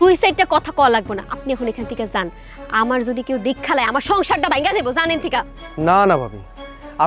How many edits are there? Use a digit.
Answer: 1